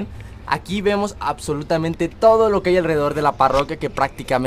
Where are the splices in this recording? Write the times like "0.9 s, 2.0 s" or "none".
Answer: none

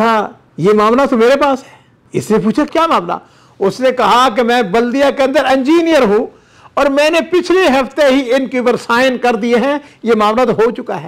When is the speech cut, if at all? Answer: none

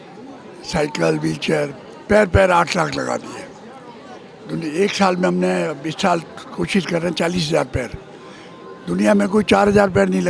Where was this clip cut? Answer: none

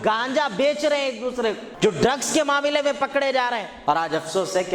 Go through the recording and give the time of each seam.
1.7 s, 3.7 s

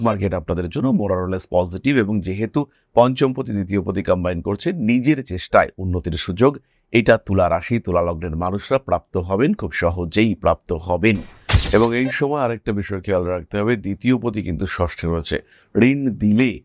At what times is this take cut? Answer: 11.5 s

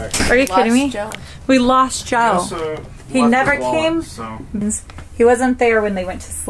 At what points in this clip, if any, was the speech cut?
4.6 s

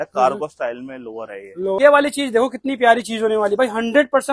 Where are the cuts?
1.8 s

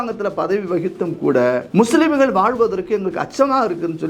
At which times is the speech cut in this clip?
1.7 s

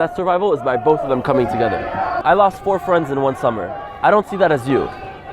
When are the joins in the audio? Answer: 2.2 s

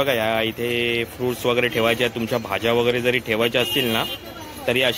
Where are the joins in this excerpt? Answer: none

